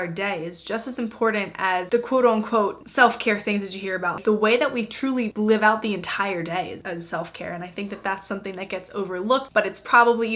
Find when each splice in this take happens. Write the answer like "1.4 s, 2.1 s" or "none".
1.9 s, 4.2 s, 6.8 s, 9.5 s